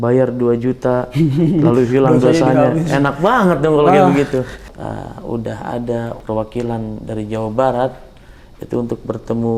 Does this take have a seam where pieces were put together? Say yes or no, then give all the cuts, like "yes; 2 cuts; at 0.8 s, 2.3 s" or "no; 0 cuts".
yes; 2 cuts; at 4.7 s, 6.2 s